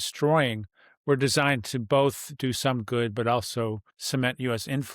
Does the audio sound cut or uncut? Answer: cut